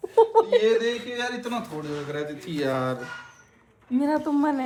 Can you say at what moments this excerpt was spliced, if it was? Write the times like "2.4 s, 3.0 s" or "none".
none